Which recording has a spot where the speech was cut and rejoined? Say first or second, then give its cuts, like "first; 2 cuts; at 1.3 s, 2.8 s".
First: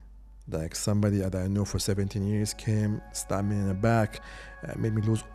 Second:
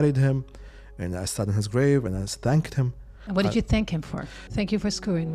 second; 2 cuts; at 3.1 s, 4.4 s